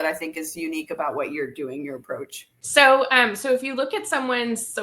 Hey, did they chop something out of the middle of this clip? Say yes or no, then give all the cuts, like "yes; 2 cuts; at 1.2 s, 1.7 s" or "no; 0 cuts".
yes; 1 cut; at 2.5 s